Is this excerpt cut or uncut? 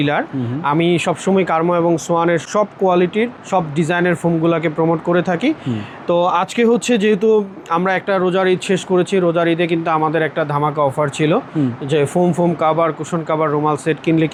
uncut